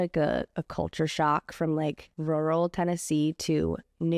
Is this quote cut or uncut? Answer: cut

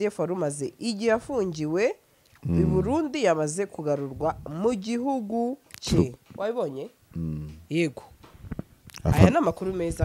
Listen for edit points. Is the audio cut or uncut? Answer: uncut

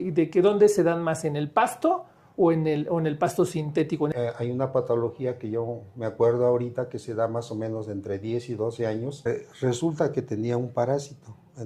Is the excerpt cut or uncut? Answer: cut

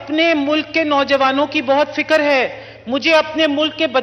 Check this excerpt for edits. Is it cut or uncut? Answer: uncut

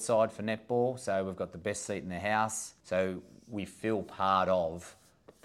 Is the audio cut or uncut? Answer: cut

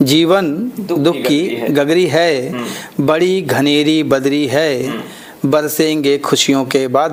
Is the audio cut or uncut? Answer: uncut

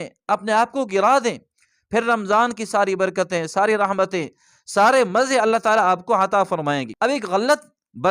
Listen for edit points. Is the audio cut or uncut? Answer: cut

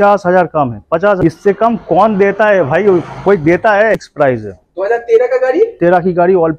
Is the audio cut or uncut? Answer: cut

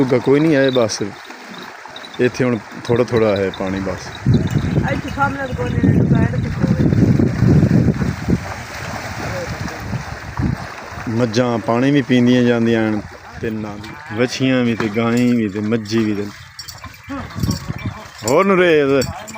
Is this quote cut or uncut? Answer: cut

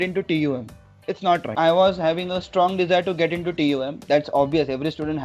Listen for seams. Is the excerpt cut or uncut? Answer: cut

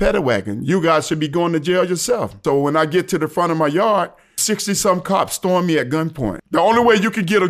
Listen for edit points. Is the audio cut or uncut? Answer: cut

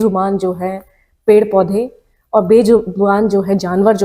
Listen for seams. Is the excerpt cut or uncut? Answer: uncut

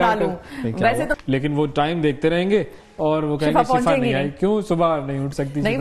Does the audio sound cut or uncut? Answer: cut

